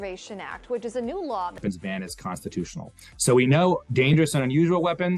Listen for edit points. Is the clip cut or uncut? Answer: cut